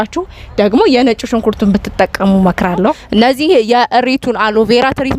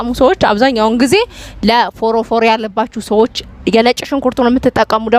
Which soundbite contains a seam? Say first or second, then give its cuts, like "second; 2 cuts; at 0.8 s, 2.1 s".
first; 1 cut; at 3.0 s